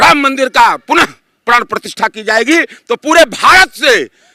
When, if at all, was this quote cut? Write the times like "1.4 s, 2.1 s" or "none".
none